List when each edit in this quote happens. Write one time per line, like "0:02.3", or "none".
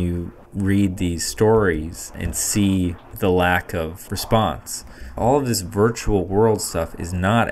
0:02.3
0:03.0
0:04.0
0:05.0